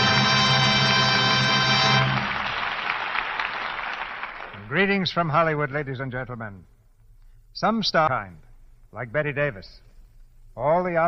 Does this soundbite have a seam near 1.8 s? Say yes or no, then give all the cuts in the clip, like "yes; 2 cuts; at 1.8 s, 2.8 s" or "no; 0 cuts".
no; 1 cut; at 8.1 s